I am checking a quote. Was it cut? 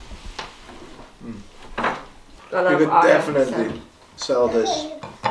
no; 0 cuts

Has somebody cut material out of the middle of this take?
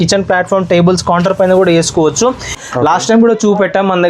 yes; 1 cut; at 2.7 s

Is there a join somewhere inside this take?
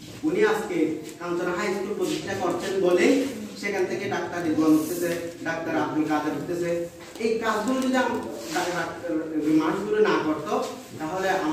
no; 0 cuts

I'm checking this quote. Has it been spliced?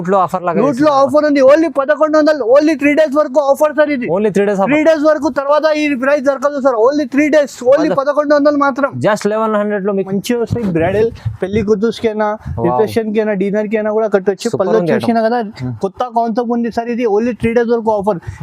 yes; 1 cut; at 10.1 s

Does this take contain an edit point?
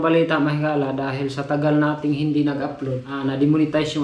yes; 1 cut; at 3.1 s

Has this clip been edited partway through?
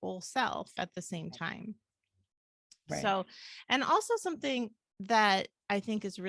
no; 0 cuts

